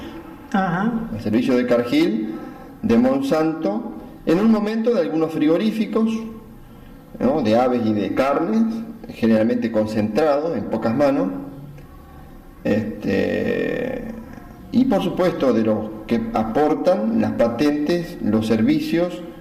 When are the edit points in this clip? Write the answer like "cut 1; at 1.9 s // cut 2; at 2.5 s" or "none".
cut 1; at 10.5 s